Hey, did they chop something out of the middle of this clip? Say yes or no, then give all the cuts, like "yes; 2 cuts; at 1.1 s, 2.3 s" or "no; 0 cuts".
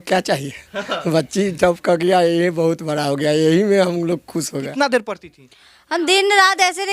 yes; 1 cut; at 4.7 s